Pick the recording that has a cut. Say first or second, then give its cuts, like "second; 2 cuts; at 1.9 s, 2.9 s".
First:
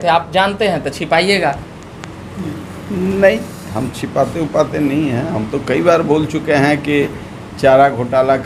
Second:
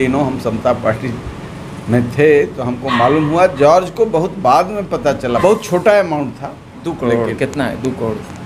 second; 1 cut; at 5.4 s